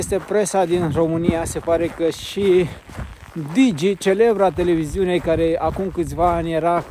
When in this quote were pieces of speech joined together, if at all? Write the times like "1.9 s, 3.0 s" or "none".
none